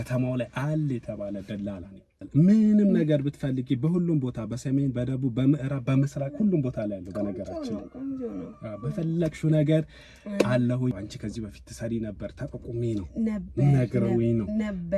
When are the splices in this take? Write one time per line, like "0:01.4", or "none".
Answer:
0:02.2
0:10.9